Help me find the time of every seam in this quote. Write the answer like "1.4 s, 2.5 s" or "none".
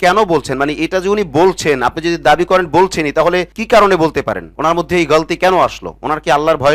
none